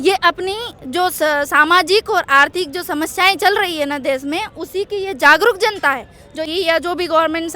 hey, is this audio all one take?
no; 1 cut; at 6.4 s

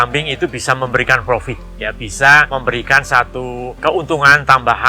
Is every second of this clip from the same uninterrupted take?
no; 2 cuts; at 2.5 s, 3.7 s

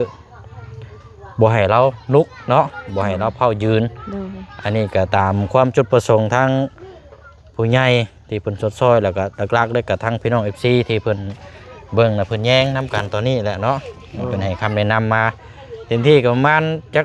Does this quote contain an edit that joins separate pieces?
no; 0 cuts

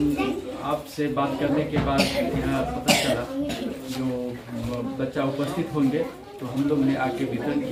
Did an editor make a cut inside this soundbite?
no; 0 cuts

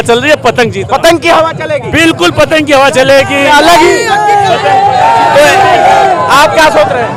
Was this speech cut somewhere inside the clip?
no; 0 cuts

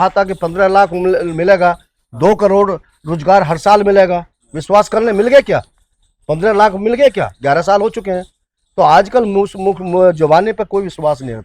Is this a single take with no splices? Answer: yes; 0 cuts

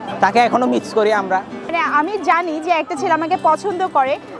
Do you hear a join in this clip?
yes; 1 cut; at 1.7 s

